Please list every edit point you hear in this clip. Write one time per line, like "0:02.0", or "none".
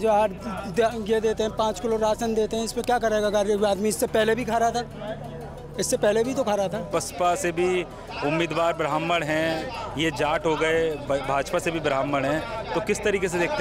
0:06.9